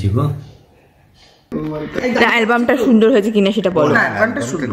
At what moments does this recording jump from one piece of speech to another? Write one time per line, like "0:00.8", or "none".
0:01.5